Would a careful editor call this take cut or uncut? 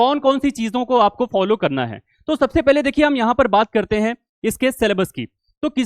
uncut